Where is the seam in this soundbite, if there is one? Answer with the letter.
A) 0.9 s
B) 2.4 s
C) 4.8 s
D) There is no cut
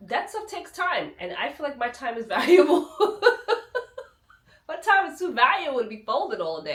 D